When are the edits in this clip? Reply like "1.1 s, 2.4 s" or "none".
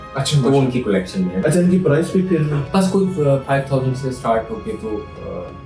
1.4 s, 2.6 s